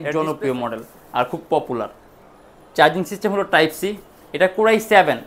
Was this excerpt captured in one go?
yes; 0 cuts

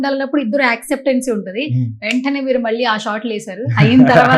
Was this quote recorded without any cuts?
yes; 0 cuts

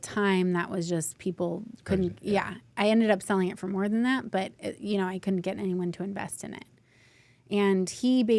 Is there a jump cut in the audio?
no; 0 cuts

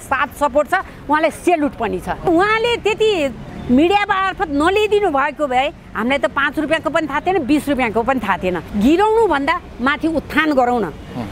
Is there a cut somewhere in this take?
yes; 2 cuts; at 2.2 s, 8.6 s

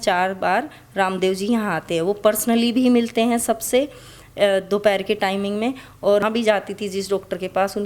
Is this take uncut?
no; 1 cut; at 6.2 s

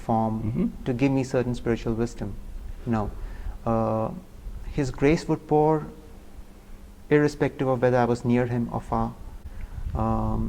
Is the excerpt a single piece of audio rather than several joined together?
yes; 0 cuts

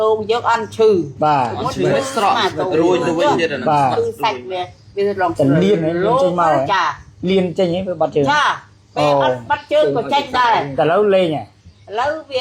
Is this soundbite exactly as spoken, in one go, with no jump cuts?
yes; 0 cuts

